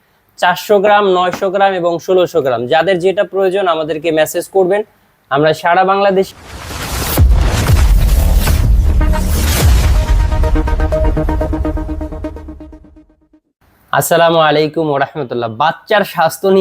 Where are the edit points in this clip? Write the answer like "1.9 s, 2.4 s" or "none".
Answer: 6.3 s